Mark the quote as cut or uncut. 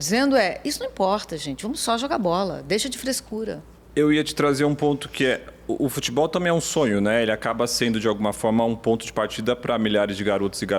uncut